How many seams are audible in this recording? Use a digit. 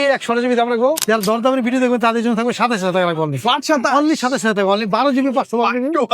1